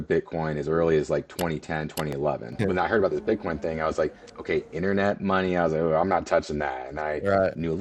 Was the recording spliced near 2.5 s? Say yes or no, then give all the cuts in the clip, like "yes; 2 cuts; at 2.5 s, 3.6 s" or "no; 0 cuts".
yes; 1 cut; at 2.5 s